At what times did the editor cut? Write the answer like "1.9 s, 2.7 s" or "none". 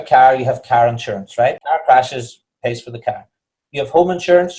1.6 s